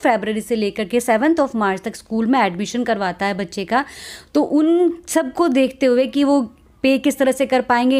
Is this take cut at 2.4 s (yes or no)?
no